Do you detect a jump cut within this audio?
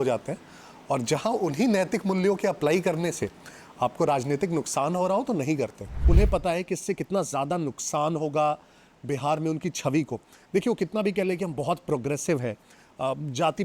yes; 1 cut; at 5.9 s

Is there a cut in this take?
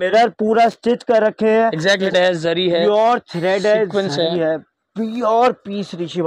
yes; 1 cut; at 2.1 s

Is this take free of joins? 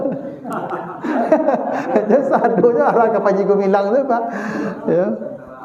yes; 0 cuts

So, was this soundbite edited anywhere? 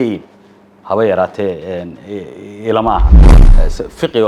yes; 1 cut; at 3.3 s

